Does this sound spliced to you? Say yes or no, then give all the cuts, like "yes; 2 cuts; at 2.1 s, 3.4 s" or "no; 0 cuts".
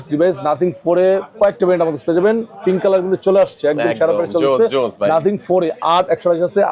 no; 0 cuts